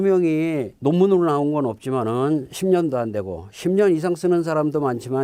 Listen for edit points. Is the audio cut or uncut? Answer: uncut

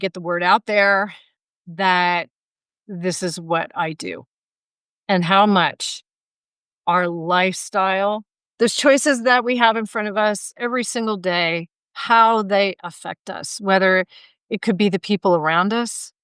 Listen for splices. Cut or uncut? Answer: cut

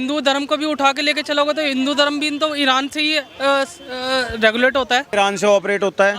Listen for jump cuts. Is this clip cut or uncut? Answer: cut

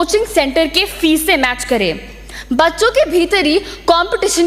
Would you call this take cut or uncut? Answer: uncut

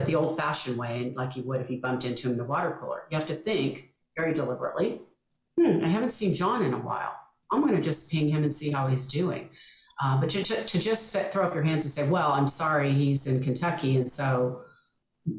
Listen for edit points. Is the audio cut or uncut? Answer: uncut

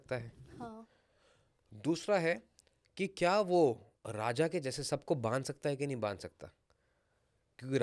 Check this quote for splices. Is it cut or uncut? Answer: uncut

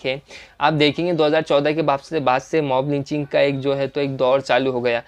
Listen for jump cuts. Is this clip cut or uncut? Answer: uncut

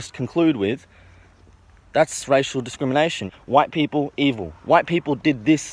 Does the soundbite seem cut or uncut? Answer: cut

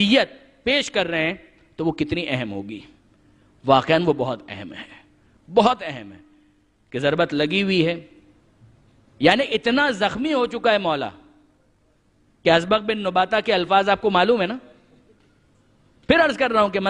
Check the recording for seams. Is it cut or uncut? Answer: uncut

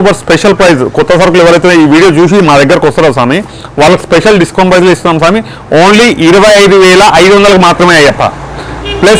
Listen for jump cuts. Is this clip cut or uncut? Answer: uncut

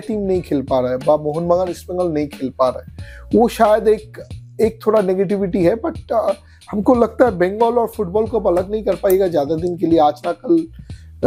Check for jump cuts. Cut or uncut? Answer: uncut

